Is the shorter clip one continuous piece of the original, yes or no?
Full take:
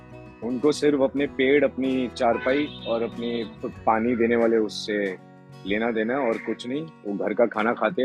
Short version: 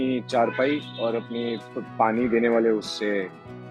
yes